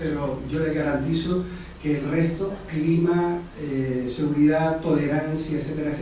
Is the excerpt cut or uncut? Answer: cut